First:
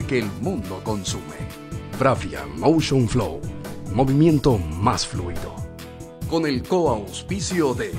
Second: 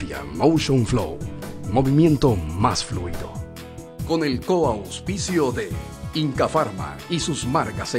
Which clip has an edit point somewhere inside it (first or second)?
first